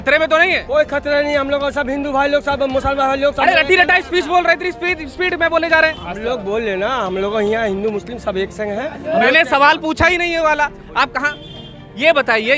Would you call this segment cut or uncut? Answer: uncut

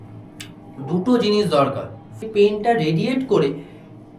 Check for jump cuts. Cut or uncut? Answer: cut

